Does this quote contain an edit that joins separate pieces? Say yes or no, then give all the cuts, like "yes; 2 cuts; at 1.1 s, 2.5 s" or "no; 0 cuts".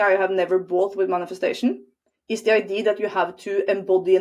no; 0 cuts